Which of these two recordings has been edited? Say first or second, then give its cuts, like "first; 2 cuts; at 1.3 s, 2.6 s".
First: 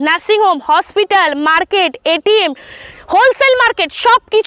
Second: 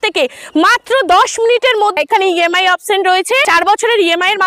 second; 2 cuts; at 2.0 s, 3.4 s